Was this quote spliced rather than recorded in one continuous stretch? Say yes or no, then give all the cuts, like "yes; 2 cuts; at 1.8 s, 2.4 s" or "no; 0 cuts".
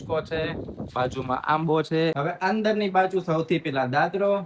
yes; 1 cut; at 2.1 s